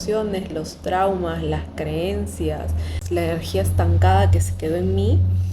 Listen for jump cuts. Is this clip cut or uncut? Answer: cut